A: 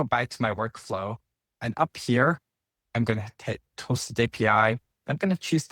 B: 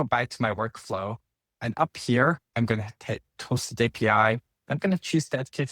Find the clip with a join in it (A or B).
B